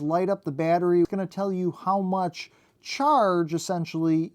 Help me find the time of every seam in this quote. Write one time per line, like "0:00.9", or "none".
0:01.1